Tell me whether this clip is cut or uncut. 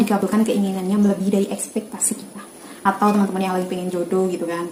uncut